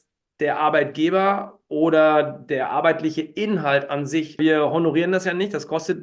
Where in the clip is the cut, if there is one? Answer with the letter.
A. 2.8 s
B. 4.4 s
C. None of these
B